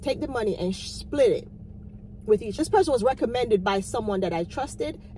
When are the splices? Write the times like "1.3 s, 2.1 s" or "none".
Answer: 2.5 s

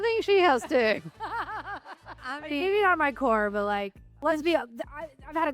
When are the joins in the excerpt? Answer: 2.1 s, 4.2 s

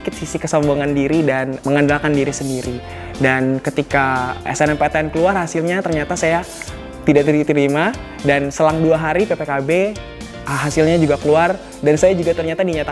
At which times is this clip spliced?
none

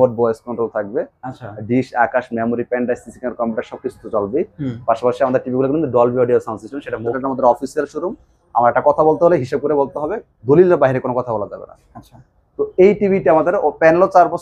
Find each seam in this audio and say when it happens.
7.2 s

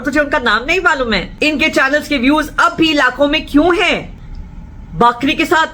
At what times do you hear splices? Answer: 1.3 s, 4.1 s

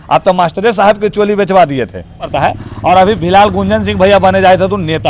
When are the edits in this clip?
2.3 s

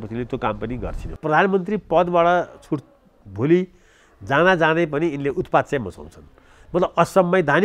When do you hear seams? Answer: 1.2 s

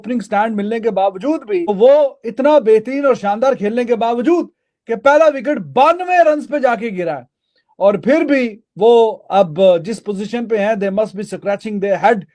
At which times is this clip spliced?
none

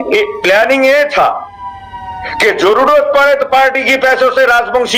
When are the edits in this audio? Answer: none

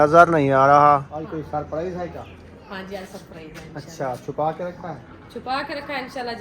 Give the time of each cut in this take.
1.2 s

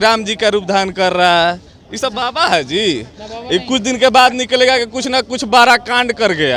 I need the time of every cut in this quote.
none

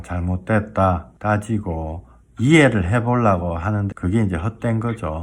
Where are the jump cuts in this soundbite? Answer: 1.1 s, 3.9 s

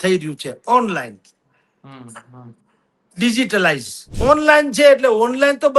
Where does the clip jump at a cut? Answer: 4.1 s

